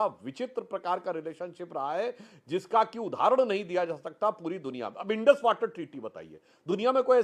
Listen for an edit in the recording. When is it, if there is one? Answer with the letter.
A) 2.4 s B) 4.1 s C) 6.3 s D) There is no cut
D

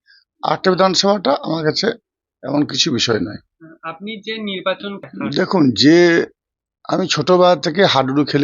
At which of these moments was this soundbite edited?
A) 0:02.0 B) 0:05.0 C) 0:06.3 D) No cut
B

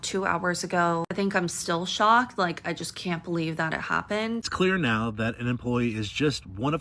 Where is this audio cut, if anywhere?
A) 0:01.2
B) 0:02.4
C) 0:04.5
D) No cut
C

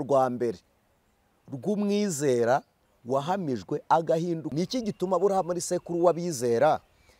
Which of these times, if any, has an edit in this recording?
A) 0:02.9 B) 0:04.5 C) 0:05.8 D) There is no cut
B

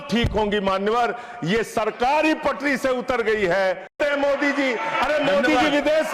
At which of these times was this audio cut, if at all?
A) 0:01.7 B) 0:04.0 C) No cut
B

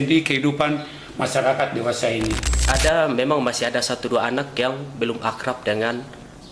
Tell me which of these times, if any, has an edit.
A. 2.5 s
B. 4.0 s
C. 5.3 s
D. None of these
A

